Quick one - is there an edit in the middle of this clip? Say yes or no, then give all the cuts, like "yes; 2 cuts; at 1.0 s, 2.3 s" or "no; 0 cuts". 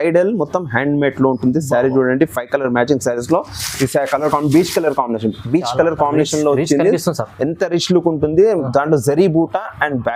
no; 0 cuts